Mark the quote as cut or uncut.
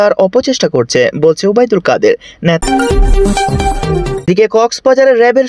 cut